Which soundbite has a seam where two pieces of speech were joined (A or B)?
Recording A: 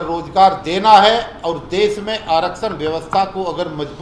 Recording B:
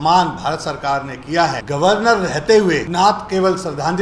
B